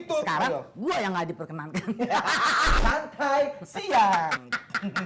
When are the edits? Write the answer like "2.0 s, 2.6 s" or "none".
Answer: 2.7 s